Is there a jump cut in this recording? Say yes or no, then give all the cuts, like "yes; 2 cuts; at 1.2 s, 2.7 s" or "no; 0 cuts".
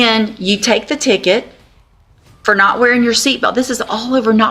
no; 0 cuts